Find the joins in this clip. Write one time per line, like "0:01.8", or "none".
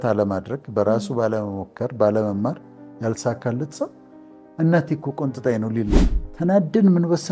0:06.1